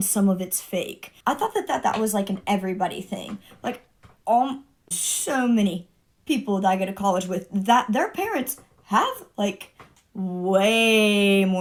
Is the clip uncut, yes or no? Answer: yes